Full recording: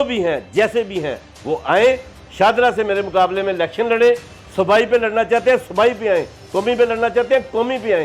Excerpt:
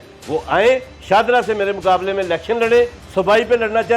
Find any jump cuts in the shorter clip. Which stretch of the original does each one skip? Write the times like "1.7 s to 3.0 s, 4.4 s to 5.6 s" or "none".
2.1 s to 2.2 s, 4.3 s to 4.4 s